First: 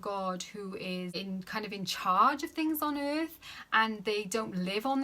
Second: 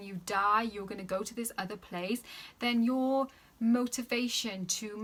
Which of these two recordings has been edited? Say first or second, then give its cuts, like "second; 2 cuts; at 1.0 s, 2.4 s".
first; 1 cut; at 1.1 s